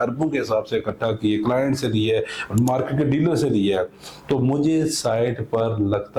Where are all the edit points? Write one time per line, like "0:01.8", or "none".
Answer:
none